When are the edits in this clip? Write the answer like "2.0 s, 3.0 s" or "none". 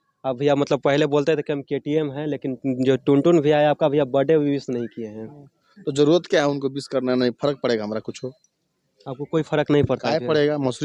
none